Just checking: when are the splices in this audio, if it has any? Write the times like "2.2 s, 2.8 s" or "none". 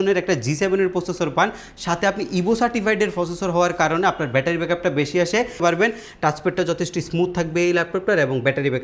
5.6 s